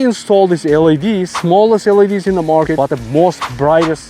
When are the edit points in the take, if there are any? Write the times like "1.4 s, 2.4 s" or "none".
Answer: 1.3 s, 2.9 s